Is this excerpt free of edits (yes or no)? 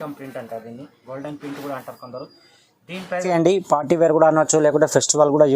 no